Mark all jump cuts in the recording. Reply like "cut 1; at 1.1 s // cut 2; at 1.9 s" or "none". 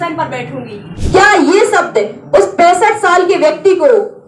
cut 1; at 0.9 s